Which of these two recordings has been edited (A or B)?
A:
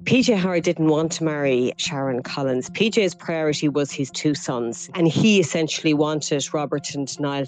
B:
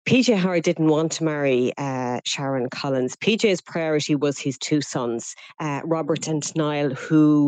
A